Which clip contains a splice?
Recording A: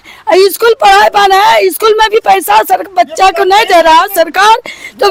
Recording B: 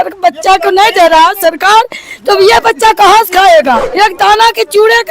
B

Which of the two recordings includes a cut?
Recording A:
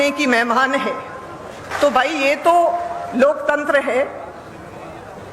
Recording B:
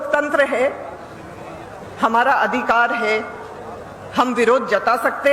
A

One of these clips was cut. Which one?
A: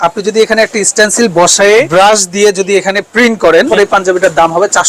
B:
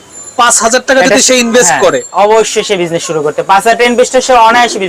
A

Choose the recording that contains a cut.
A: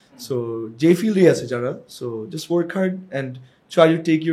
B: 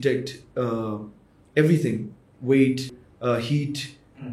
B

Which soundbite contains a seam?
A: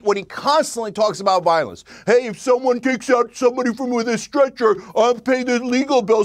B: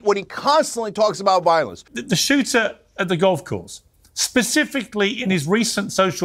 B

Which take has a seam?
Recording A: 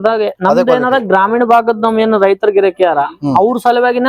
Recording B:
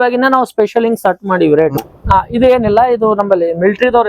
B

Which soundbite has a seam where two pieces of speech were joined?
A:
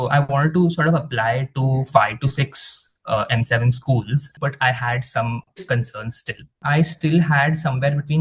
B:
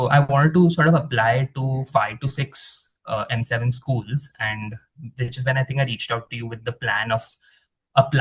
A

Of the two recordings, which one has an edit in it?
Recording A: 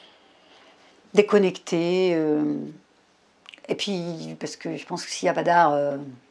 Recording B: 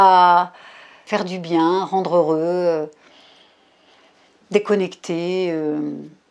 B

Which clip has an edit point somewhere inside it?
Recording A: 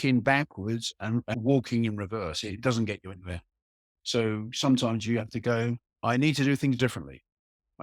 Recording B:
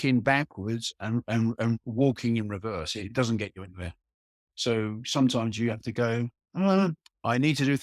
A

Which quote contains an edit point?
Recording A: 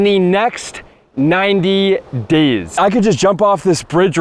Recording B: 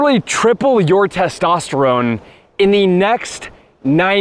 A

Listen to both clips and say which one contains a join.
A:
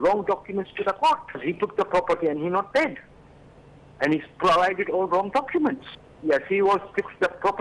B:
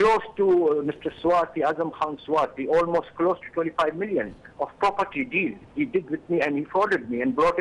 A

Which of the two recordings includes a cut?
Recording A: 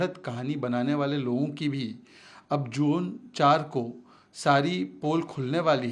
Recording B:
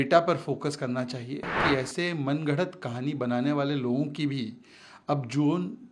B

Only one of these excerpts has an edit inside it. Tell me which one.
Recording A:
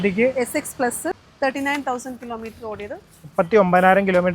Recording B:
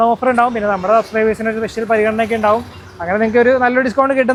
A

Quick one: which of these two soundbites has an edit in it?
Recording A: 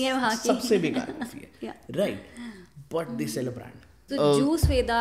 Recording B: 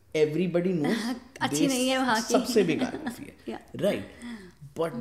A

